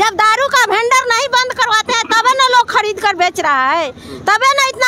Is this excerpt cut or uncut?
uncut